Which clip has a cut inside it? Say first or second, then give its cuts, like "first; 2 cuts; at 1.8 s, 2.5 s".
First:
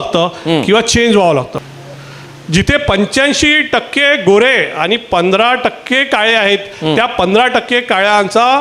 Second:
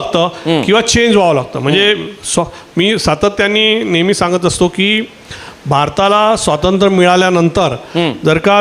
first; 1 cut; at 1.5 s